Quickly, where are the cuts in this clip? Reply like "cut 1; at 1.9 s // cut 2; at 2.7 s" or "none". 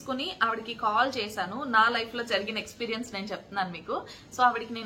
none